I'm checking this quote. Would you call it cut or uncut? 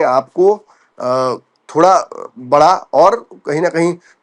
uncut